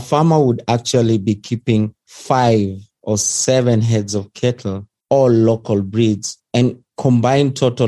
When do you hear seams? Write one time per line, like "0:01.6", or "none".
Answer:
none

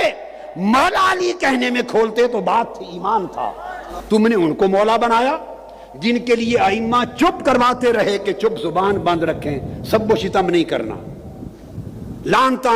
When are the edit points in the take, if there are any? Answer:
0:04.0

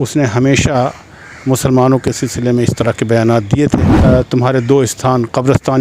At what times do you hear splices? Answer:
0:03.9

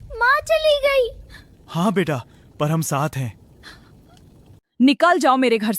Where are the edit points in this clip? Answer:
0:04.6

